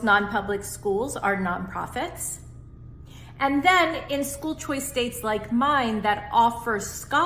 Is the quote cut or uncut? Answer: uncut